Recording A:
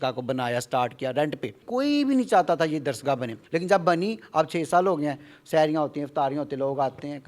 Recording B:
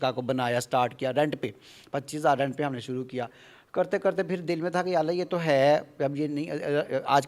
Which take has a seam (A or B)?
A